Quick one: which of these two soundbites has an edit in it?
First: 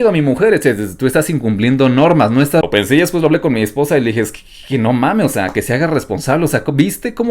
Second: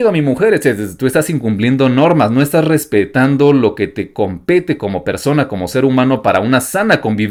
first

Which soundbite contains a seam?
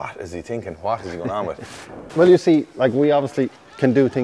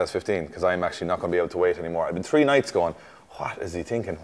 first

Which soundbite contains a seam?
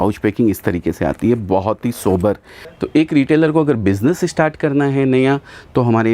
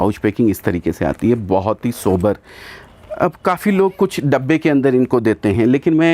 first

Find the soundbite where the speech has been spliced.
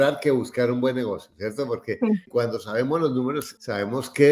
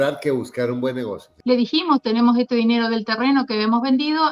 second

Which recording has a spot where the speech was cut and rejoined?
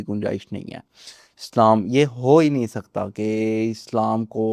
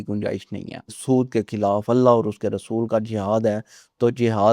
second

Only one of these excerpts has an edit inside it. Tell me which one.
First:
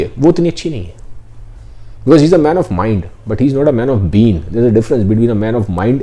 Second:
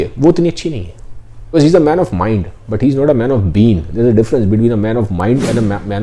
second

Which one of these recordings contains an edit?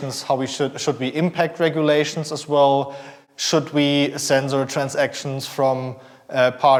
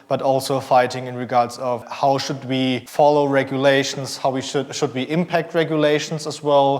second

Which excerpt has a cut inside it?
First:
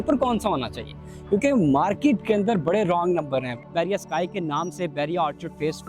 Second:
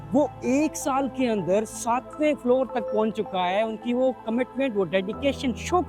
first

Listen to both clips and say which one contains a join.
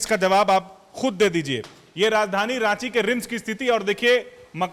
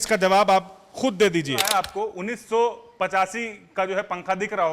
second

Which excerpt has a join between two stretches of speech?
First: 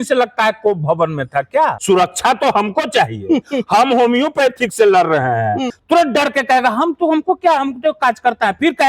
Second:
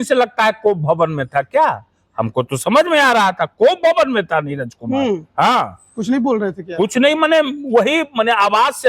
first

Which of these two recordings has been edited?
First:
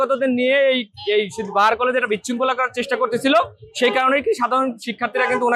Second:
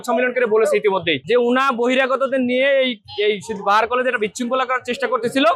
second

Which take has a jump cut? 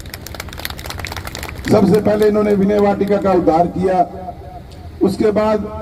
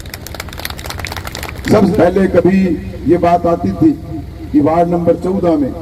second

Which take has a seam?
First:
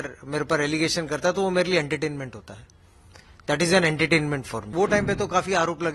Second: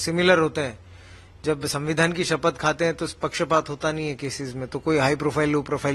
first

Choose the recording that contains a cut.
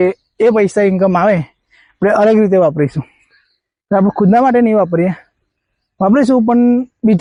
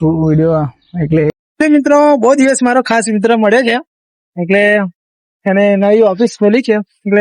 second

